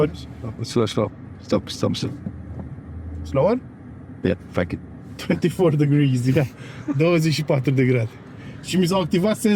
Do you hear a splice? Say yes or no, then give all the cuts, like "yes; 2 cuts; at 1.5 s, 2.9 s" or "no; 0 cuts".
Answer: no; 0 cuts